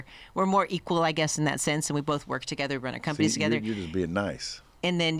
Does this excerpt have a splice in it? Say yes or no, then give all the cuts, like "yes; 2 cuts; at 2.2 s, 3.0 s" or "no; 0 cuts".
no; 0 cuts